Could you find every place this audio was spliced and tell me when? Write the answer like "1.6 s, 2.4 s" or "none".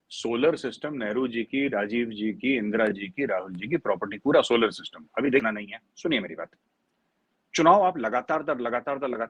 5.4 s